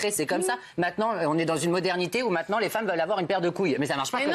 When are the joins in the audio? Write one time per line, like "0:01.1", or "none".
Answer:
none